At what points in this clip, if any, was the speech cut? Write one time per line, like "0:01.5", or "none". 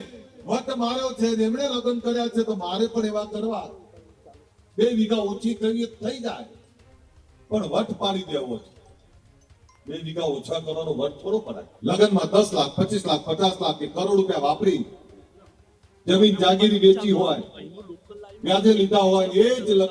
0:11.6